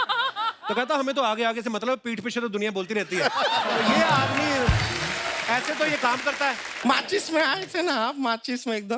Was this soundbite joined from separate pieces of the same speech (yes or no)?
yes